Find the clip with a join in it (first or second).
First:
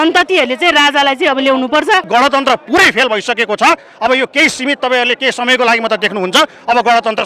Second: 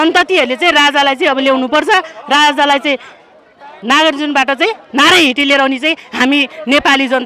first